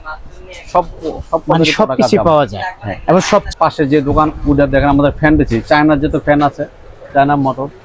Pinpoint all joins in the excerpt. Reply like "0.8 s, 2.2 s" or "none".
3.5 s